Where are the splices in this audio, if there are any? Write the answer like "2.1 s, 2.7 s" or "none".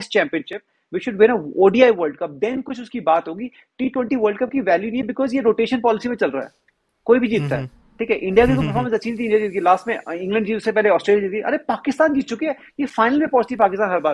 none